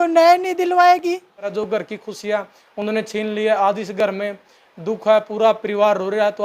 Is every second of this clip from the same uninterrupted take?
no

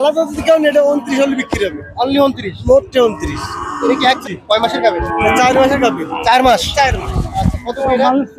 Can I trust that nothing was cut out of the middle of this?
no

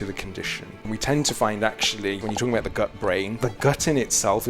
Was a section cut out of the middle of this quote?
yes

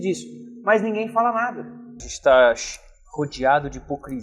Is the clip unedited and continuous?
no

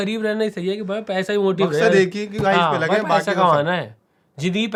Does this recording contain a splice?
no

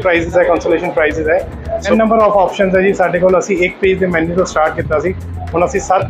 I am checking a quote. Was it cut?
yes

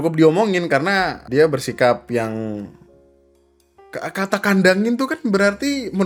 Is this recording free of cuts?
yes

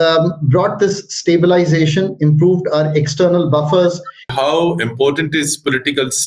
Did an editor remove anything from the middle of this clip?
yes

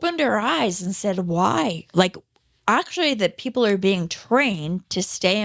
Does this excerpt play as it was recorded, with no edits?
yes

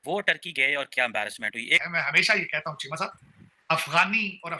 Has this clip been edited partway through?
yes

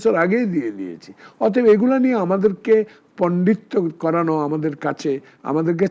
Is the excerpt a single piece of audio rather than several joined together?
yes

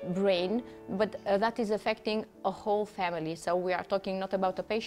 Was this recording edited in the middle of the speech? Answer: no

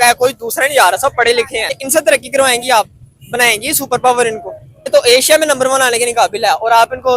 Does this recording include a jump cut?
yes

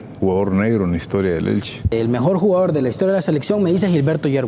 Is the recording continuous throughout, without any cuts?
no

